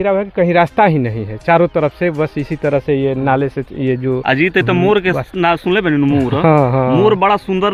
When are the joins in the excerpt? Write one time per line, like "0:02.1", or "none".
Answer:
none